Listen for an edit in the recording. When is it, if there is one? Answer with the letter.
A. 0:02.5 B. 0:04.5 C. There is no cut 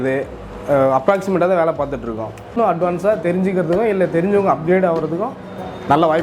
A